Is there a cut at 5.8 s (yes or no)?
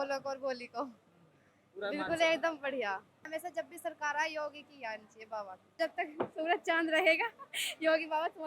yes